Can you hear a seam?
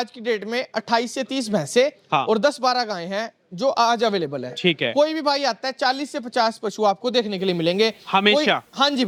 no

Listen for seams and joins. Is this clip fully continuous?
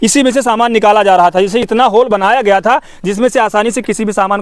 yes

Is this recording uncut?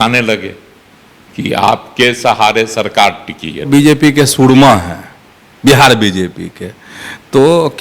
no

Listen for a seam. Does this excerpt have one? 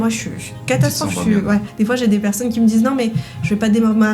yes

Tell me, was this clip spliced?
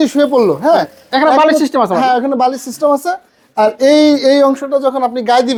no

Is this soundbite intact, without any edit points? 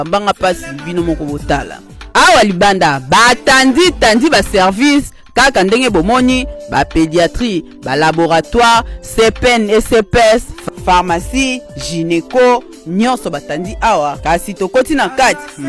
yes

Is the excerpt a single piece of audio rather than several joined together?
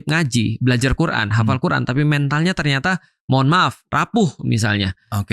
no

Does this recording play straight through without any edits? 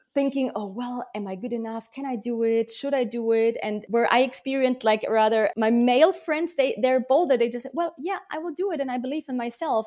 no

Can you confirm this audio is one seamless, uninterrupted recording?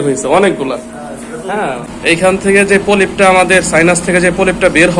no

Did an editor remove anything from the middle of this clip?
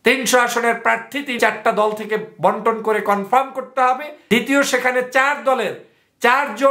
yes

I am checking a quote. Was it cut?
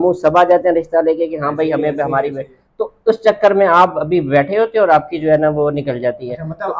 no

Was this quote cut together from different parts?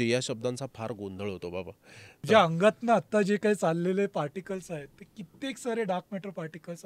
yes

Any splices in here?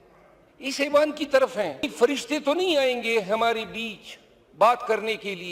yes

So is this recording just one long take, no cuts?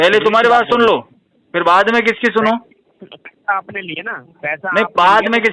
yes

